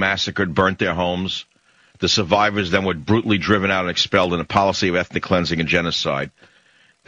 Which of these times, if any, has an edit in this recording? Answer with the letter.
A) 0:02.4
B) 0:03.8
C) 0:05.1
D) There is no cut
C